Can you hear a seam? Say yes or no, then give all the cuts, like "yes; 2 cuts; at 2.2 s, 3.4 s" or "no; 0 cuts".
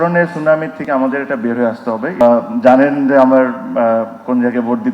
yes; 1 cut; at 2.2 s